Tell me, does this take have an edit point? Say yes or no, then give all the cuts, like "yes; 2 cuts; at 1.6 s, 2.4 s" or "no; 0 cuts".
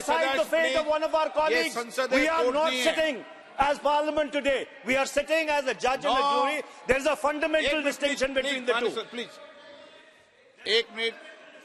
no; 0 cuts